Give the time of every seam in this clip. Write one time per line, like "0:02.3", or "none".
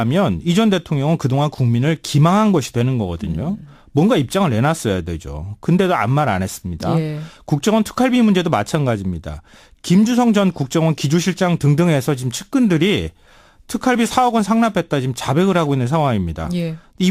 none

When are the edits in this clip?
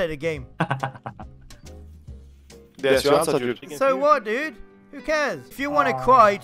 0:03.6

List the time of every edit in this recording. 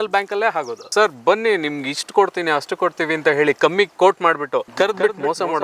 0:00.9
0:04.7

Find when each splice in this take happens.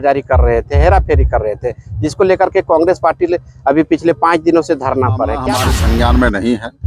0:05.5

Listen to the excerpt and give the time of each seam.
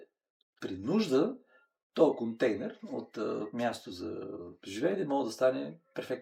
none

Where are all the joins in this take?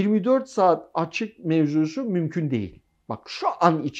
none

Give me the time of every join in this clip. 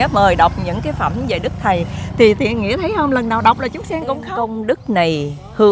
0:04.3

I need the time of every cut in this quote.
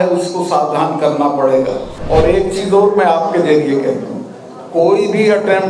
0:02.0

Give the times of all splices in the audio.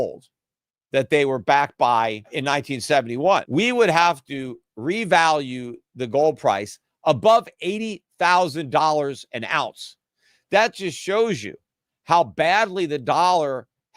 0:02.4
0:03.5

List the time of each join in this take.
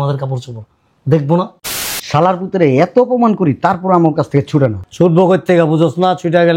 0:01.6

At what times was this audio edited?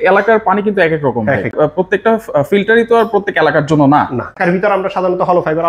0:01.5
0:04.3

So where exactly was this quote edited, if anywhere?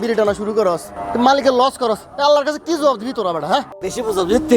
0:00.9
0:03.7

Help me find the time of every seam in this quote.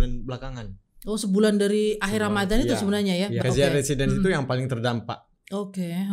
0:03.4

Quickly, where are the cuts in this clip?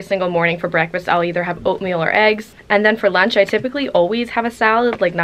0:02.5

